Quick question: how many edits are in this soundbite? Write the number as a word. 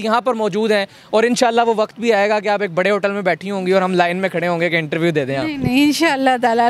zero